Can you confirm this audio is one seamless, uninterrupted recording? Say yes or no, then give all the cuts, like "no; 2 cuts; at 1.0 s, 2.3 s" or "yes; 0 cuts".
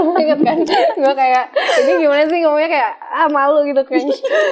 yes; 0 cuts